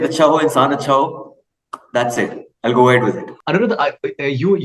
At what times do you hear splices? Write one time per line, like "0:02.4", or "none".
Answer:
none